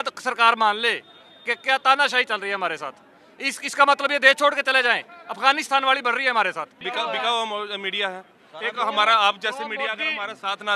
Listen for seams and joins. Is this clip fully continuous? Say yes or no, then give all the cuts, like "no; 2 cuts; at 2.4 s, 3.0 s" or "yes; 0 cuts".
no; 1 cut; at 6.8 s